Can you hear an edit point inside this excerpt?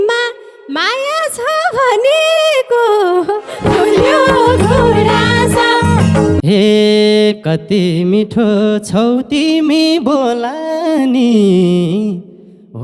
yes; 1 cut; at 6.4 s

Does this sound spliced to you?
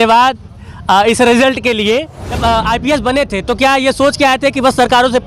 yes; 1 cut; at 2.3 s

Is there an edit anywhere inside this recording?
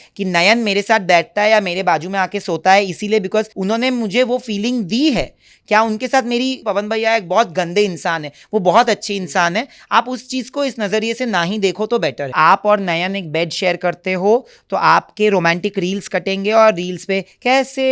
yes; 3 cuts; at 3.5 s, 6.6 s, 12.3 s

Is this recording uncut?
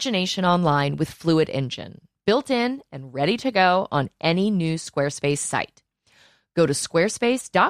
yes; 0 cuts

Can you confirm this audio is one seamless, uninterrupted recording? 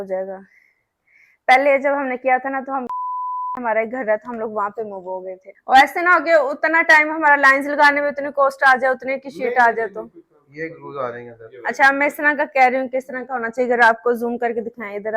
no; 1 cut; at 5.5 s

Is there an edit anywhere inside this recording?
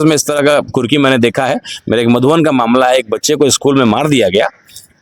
no; 0 cuts

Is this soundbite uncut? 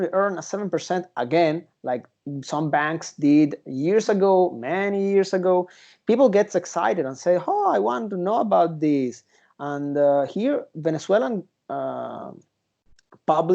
yes; 0 cuts

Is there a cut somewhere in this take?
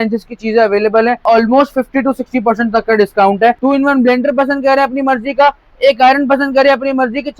yes; 2 cuts; at 1.2 s, 3.6 s

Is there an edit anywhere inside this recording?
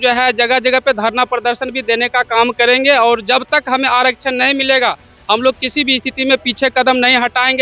no; 0 cuts

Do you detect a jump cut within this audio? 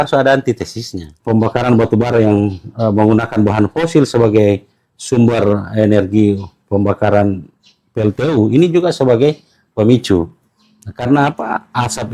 yes; 1 cut; at 1.1 s

